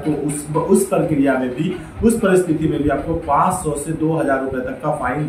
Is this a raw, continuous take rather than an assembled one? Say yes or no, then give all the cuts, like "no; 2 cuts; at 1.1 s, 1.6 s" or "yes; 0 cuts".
yes; 0 cuts